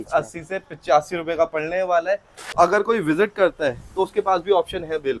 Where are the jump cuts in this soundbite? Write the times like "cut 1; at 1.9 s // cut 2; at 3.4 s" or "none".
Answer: cut 1; at 2.5 s

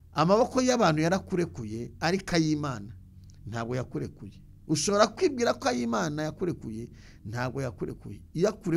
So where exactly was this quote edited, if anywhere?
none

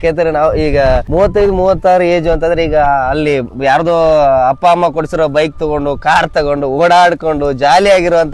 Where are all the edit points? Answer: cut 1; at 1.1 s

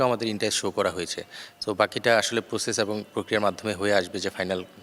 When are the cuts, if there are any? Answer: none

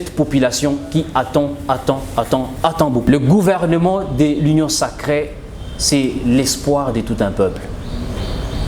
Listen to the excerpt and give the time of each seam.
cut 1; at 3.0 s

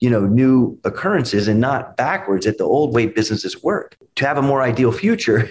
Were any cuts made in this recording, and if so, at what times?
cut 1; at 4.0 s

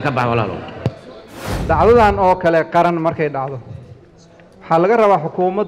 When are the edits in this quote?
cut 1; at 1.6 s

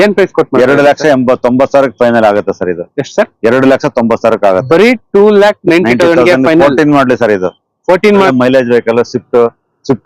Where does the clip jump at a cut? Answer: cut 1; at 8.3 s

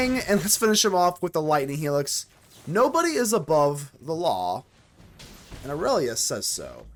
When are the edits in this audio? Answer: none

